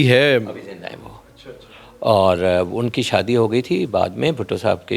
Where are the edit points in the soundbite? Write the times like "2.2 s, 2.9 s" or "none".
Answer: none